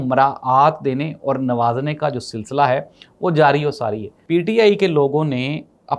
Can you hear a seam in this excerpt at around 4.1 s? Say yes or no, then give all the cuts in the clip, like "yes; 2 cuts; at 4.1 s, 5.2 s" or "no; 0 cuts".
yes; 1 cut; at 4.1 s